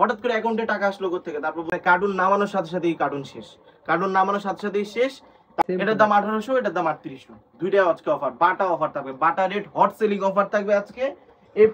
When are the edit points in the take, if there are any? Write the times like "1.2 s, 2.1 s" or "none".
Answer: 1.7 s, 5.6 s